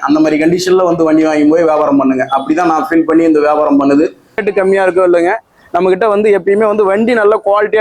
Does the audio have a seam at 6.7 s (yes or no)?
no